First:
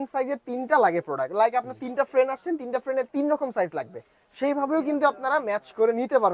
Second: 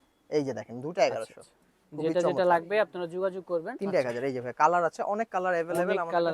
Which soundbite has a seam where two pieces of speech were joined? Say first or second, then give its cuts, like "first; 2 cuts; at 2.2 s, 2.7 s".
second; 1 cut; at 3.7 s